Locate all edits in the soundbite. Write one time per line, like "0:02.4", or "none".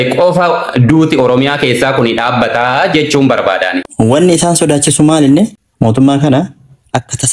0:03.9
0:05.6